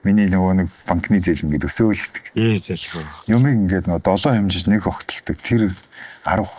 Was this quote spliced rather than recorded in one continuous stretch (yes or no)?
yes